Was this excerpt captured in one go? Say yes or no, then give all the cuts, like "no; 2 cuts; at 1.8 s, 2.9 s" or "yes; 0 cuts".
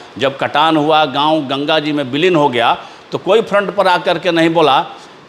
yes; 0 cuts